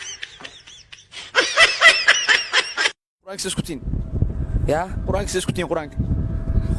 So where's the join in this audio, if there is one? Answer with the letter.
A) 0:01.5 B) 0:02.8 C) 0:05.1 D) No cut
B